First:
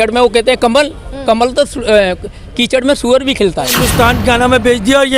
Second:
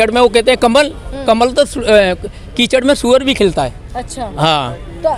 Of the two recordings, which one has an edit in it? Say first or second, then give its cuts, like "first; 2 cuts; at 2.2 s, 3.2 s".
first; 1 cut; at 3.8 s